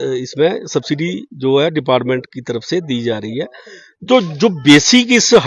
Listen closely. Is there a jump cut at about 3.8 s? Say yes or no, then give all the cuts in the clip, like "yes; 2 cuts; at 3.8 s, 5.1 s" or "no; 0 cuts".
no; 0 cuts